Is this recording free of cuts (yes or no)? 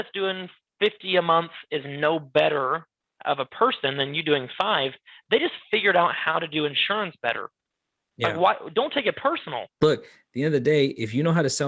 no